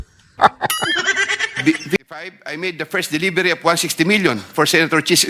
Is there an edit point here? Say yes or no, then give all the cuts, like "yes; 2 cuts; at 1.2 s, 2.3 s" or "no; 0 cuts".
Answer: yes; 1 cut; at 2.0 s